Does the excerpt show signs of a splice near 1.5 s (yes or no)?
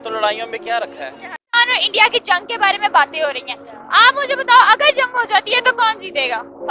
yes